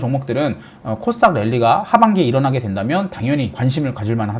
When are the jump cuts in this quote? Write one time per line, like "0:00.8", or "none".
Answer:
none